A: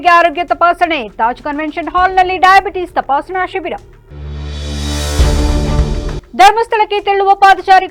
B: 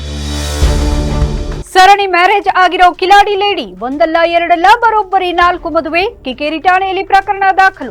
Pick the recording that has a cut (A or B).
B